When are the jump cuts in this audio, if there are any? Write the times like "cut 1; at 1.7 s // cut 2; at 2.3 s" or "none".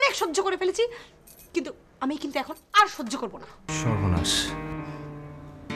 cut 1; at 3.7 s